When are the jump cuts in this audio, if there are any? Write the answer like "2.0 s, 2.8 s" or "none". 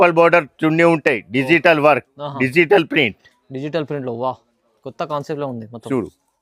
none